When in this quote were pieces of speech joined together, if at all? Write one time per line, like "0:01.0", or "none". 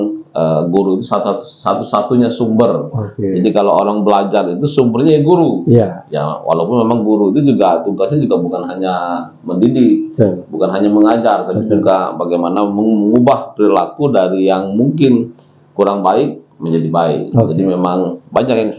none